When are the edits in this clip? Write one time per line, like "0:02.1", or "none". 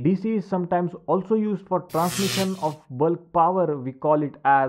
none